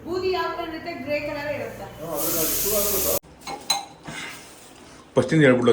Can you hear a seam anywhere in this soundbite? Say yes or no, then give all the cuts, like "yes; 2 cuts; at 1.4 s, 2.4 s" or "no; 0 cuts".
yes; 1 cut; at 3.3 s